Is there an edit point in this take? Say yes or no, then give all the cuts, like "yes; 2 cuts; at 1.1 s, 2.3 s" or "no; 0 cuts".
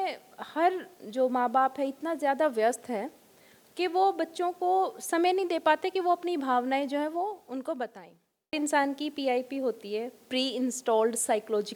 yes; 1 cut; at 8.5 s